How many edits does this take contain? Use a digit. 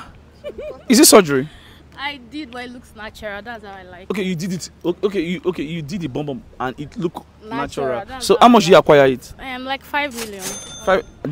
0